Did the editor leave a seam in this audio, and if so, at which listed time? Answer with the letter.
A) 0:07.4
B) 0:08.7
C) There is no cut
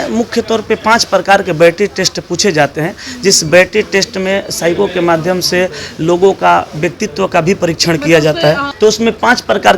B